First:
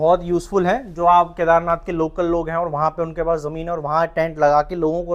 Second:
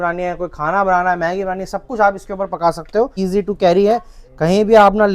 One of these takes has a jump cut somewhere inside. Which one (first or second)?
second